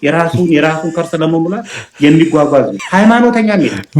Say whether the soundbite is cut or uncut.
cut